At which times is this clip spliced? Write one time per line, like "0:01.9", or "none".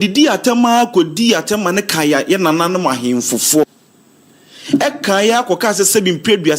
0:02.2
0:03.6